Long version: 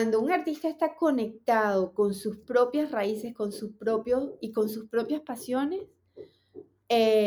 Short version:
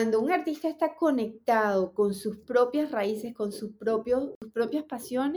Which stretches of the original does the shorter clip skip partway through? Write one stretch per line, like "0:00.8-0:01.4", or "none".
0:04.4-0:04.8